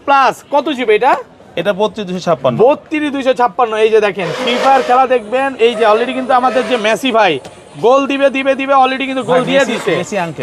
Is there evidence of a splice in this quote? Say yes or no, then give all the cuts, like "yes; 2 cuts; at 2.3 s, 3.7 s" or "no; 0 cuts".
no; 0 cuts